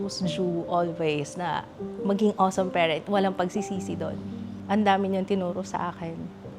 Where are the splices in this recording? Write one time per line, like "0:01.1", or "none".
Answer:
none